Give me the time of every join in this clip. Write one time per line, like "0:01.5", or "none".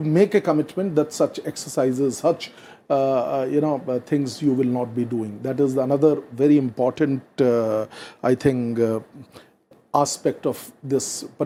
none

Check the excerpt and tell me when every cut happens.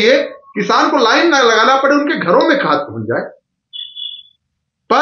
none

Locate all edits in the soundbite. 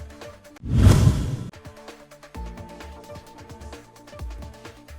0:03.9

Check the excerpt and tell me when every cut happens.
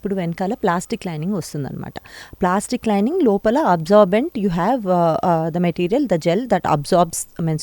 none

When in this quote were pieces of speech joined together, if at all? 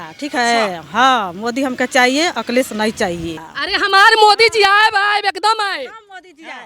0:03.5

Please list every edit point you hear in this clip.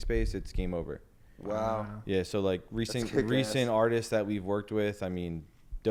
none

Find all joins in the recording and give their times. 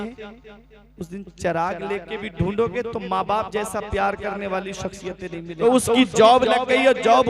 0:05.6

